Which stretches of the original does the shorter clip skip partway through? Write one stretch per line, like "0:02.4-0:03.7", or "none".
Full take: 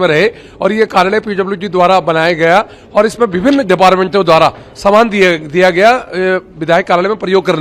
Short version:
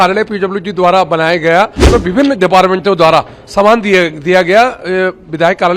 0:02.8-0:03.1